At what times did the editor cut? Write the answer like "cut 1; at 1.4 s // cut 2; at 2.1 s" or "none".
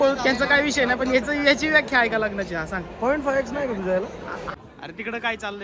cut 1; at 4.5 s